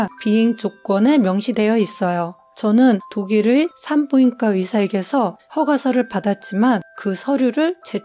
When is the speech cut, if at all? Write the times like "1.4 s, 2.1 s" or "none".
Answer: 3.1 s, 5.4 s